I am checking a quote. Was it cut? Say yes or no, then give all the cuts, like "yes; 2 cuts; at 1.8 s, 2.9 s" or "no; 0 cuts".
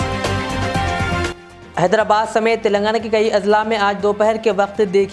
yes; 1 cut; at 1.2 s